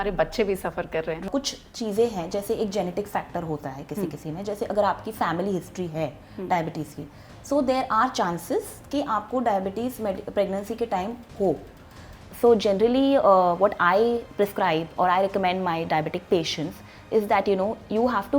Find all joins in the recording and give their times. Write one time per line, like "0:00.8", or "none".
0:01.3
0:12.2